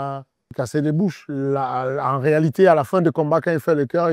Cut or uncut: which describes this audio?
uncut